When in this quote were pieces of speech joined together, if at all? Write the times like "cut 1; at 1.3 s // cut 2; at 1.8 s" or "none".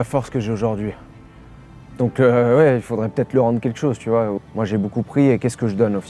cut 1; at 4.3 s